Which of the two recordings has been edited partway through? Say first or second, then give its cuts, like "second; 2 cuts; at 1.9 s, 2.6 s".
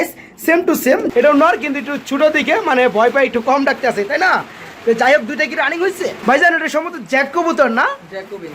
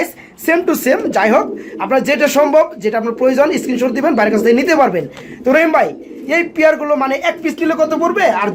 first; 2 cuts; at 1.1 s, 6.2 s